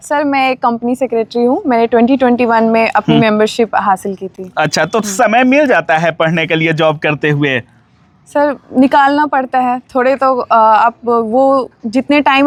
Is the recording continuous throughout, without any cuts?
yes; 0 cuts

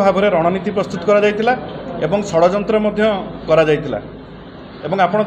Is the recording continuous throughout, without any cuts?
yes; 0 cuts

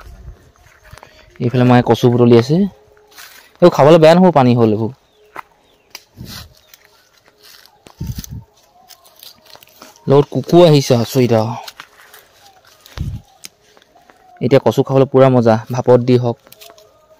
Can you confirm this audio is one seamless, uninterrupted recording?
yes; 0 cuts

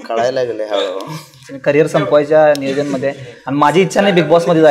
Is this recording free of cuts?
yes; 0 cuts

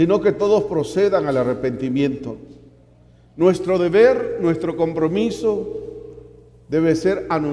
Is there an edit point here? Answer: yes; 1 cut; at 5.1 s

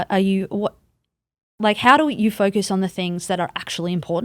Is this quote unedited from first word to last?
yes; 0 cuts

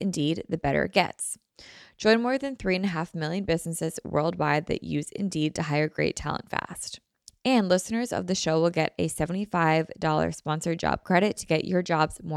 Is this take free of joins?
yes; 0 cuts

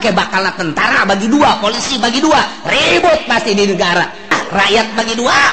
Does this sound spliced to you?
yes; 1 cut; at 4.3 s

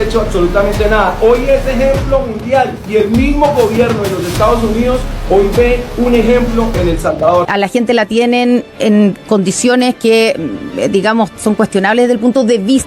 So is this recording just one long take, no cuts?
no; 1 cut; at 7.5 s

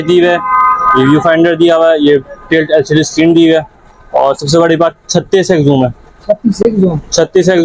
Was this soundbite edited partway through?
no; 0 cuts

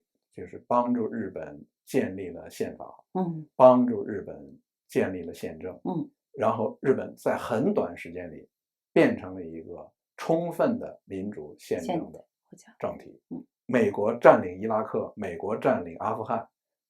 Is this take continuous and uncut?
no; 1 cut; at 13.5 s

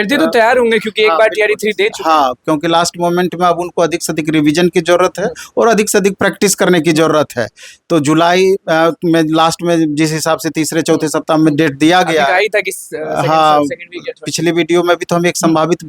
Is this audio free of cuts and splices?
yes; 0 cuts

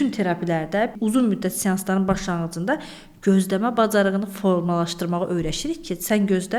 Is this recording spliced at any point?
yes; 1 cut; at 0.9 s

